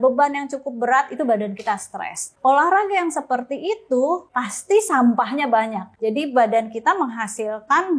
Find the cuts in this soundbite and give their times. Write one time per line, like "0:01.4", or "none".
0:02.3
0:04.4
0:05.8

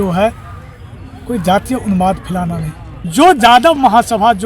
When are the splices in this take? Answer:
0:02.9

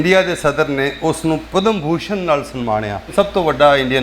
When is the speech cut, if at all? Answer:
0:01.4
0:03.1

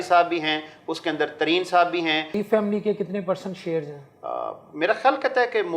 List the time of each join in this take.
0:02.4

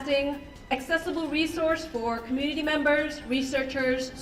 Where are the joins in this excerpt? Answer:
none

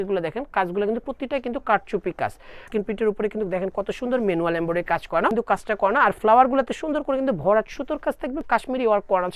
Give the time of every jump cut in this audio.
0:02.6
0:05.4
0:08.4

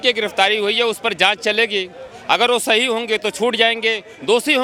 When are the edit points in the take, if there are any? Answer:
none

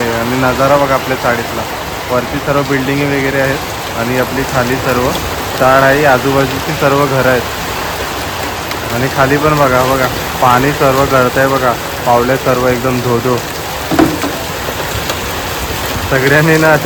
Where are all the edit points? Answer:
none

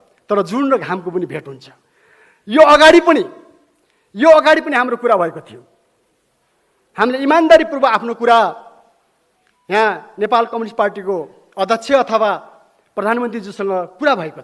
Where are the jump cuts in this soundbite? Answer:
none

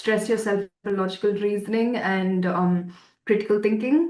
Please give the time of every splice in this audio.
none

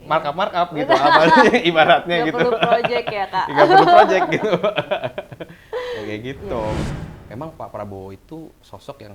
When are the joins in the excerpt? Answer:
0:06.8

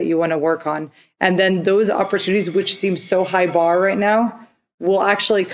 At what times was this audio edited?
none

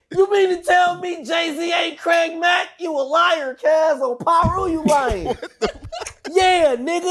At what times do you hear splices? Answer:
0:05.7

